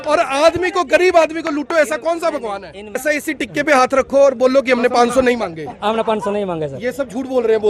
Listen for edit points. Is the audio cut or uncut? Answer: cut